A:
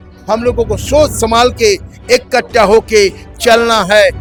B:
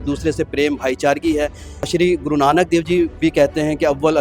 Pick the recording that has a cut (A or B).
B